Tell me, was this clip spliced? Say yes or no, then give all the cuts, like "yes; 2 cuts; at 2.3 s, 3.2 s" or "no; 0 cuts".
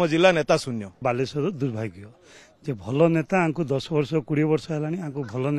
yes; 1 cut; at 1.0 s